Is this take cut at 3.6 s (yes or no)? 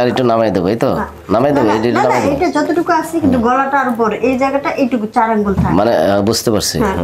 no